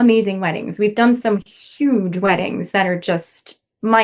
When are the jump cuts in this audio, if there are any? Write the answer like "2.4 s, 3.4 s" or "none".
none